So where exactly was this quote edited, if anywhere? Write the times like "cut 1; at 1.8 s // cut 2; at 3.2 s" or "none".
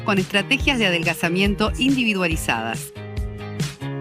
cut 1; at 2.8 s